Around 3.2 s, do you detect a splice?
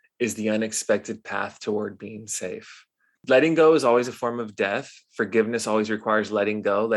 yes; 1 cut; at 3.2 s

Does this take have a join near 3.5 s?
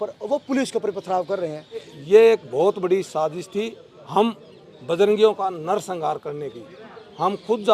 no; 1 cut; at 2.0 s

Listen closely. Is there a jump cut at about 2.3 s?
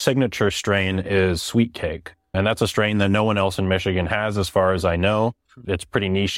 yes; 1 cut; at 2.3 s

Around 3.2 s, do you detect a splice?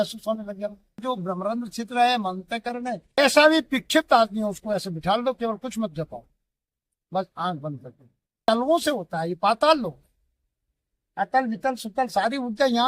yes; 3 cuts; at 1.0 s, 3.2 s, 8.5 s

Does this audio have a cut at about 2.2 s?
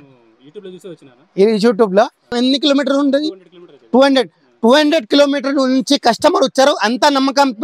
yes; 1 cut; at 2.2 s

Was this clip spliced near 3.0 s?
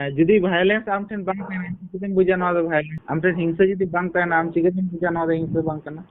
yes; 1 cut; at 3.0 s

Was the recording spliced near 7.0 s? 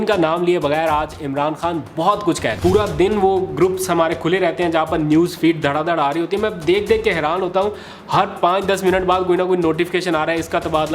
no; 1 cut; at 2.6 s

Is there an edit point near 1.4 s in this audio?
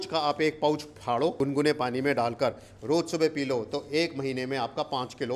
yes; 1 cut; at 1.4 s

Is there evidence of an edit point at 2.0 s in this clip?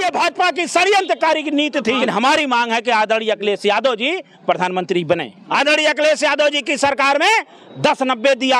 yes; 2 cuts; at 2.0 s, 5.4 s

